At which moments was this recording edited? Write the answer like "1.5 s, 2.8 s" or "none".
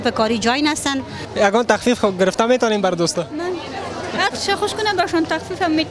1.2 s